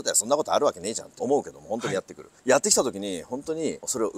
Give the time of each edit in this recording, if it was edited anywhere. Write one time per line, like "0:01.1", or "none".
0:01.1